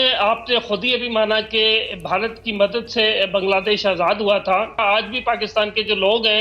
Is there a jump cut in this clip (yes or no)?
yes